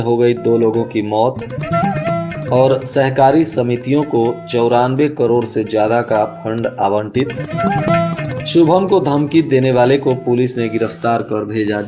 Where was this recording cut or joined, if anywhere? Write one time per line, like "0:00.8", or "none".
none